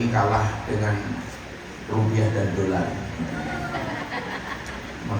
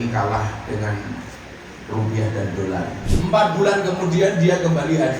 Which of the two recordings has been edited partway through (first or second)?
second